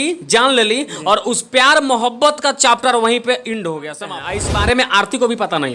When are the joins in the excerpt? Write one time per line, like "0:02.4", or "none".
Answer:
0:04.0